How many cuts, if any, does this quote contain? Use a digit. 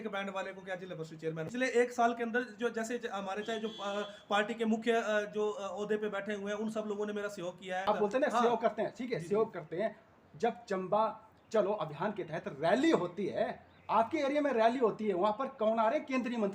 2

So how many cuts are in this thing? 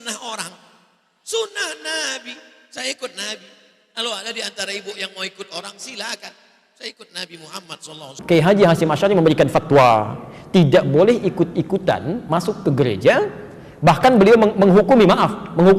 1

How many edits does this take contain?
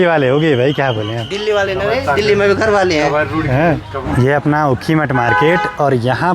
0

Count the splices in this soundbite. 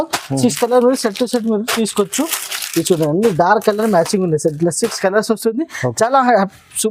0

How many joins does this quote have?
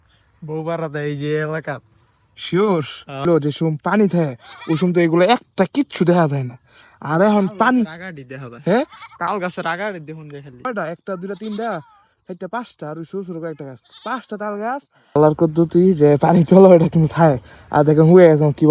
3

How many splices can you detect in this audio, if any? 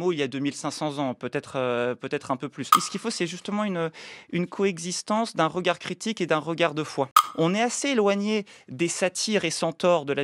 2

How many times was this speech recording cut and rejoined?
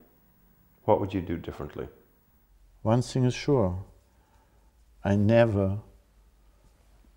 1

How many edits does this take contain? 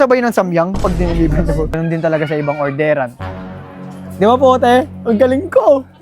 1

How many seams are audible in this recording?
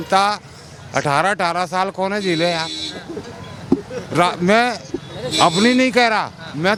0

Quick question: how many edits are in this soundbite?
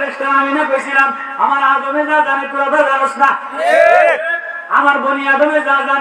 0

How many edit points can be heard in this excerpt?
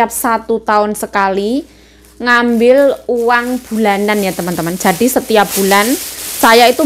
0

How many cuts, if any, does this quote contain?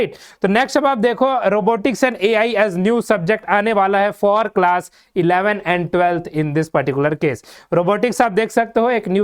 0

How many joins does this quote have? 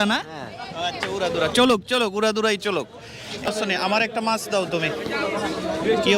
1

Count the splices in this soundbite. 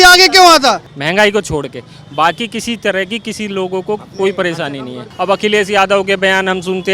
2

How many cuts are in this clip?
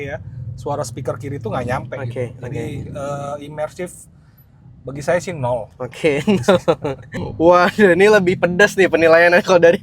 1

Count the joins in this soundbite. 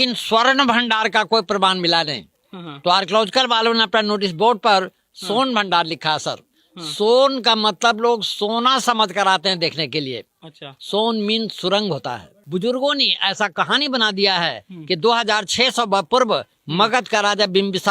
1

